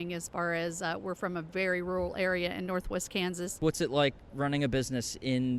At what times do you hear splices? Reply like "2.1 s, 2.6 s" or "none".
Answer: 3.6 s